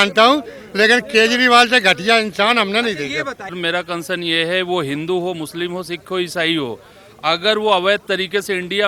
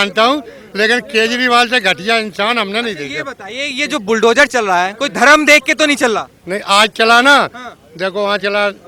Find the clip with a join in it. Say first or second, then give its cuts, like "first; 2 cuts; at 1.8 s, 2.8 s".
first; 1 cut; at 3.6 s